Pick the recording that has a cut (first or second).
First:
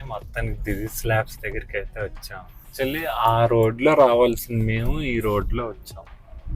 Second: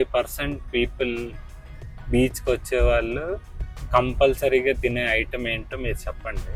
first